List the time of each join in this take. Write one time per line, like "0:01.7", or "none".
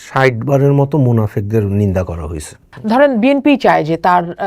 0:02.7